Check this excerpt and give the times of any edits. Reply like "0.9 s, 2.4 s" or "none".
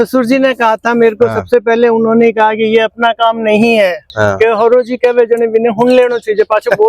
4.1 s